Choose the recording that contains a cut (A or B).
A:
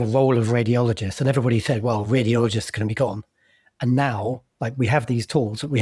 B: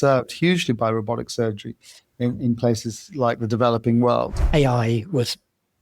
B